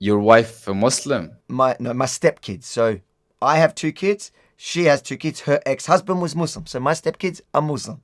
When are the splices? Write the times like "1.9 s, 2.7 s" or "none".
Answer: 1.4 s